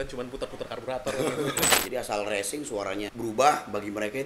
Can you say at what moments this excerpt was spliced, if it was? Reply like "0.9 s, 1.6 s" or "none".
1.7 s, 3.1 s